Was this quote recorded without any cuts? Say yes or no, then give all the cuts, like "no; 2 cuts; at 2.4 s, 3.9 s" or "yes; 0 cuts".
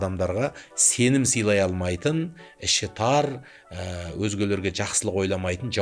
yes; 0 cuts